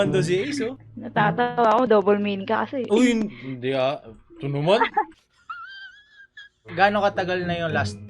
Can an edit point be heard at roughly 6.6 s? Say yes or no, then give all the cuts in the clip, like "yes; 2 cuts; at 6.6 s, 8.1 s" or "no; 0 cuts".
yes; 1 cut; at 6.6 s